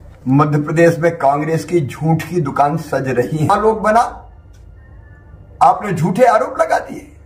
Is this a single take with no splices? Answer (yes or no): no